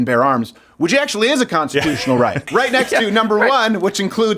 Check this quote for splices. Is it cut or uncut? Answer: cut